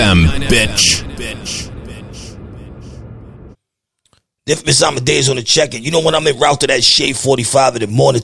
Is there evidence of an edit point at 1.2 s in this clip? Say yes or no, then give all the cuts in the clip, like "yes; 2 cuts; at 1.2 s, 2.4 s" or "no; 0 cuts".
no; 1 cut; at 3.5 s